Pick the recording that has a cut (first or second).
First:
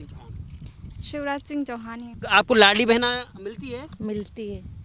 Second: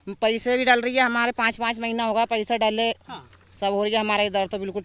first